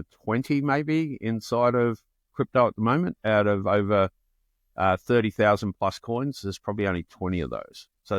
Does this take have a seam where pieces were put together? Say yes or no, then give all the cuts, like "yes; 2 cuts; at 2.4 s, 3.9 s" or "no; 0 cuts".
no; 0 cuts